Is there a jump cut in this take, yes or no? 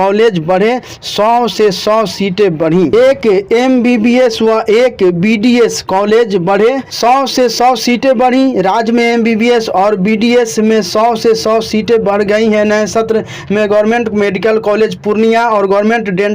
yes